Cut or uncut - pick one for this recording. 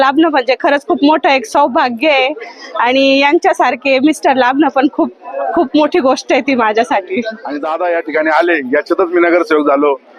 cut